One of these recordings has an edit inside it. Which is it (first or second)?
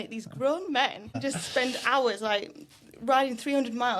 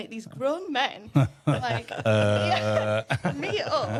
first